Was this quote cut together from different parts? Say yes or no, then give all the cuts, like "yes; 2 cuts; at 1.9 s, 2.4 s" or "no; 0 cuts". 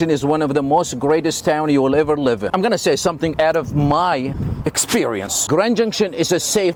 no; 0 cuts